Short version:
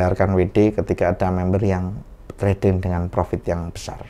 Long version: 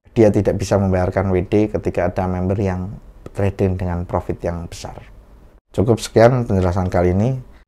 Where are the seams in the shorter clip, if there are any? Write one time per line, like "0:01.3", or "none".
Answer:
none